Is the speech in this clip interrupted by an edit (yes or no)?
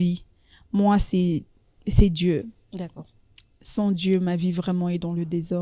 no